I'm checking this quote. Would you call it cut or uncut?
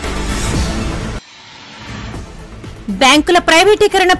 cut